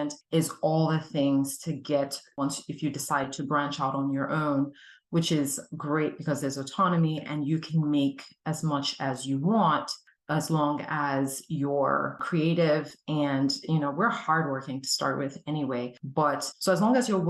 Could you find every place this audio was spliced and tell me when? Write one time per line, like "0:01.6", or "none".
0:02.4